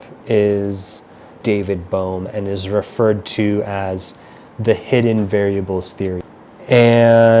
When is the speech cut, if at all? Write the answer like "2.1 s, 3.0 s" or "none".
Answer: 1.3 s, 6.3 s

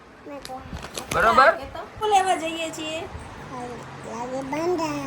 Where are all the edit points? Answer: 2.0 s

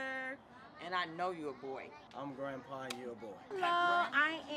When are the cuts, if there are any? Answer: 2.0 s, 3.4 s

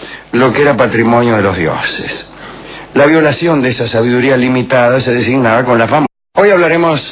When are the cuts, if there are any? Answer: none

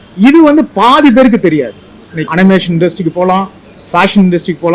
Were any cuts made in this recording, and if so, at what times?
2.2 s

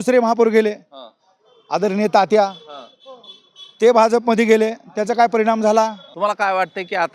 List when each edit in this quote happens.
6.0 s

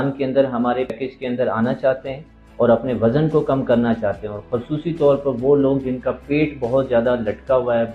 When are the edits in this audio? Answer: 0.9 s

